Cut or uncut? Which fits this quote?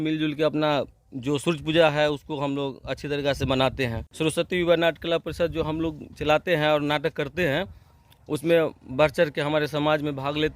cut